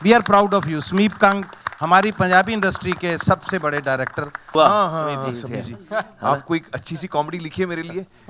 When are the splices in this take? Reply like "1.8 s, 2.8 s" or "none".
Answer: 4.5 s